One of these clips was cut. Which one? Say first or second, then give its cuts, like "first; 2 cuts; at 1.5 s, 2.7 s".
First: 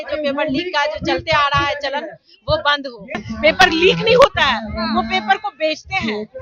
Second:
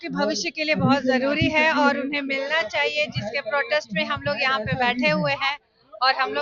first; 1 cut; at 3.2 s